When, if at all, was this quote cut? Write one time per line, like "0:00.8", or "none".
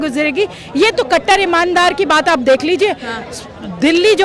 none